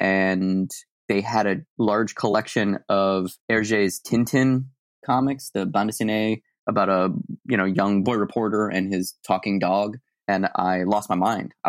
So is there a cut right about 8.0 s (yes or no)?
yes